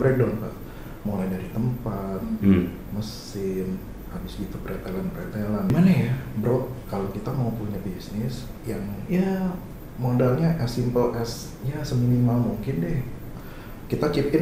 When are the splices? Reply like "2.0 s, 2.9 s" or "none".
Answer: 5.7 s